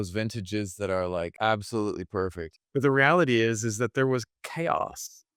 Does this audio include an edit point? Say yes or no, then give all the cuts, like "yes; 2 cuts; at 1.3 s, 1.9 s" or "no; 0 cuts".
no; 0 cuts